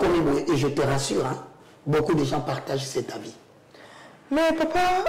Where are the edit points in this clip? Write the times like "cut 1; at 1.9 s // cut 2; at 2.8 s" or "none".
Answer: none